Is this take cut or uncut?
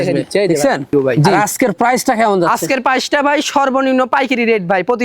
cut